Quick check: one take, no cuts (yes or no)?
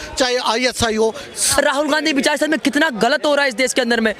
no